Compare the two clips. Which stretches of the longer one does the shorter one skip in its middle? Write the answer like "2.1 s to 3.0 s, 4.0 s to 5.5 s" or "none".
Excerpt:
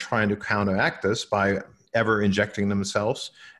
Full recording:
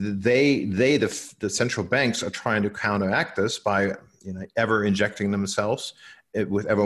4.1 s to 4.4 s